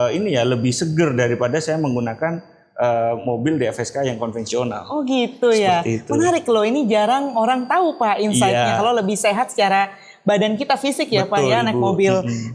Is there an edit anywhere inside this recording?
no; 0 cuts

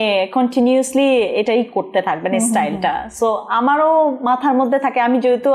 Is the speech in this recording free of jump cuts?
yes; 0 cuts

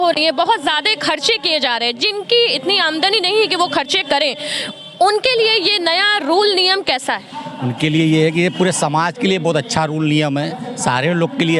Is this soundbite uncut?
yes; 0 cuts

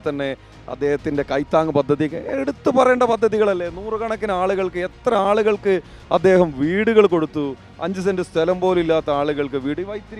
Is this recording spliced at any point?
no; 0 cuts

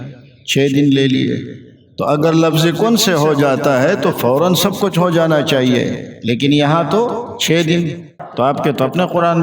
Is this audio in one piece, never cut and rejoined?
no; 1 cut; at 8.1 s

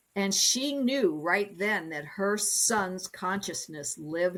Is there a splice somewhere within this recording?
no; 0 cuts

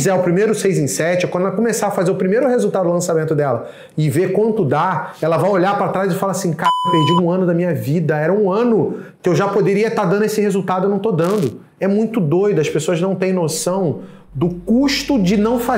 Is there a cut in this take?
no; 0 cuts

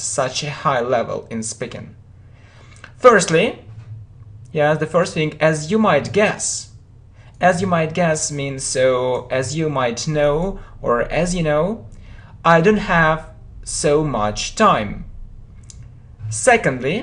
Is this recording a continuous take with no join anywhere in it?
no; 1 cut; at 11.4 s

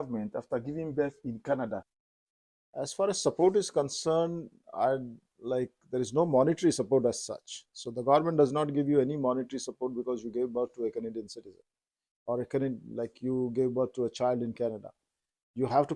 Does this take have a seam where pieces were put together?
yes; 1 cut; at 1.9 s

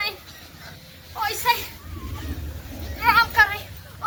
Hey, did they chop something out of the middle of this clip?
no; 0 cuts

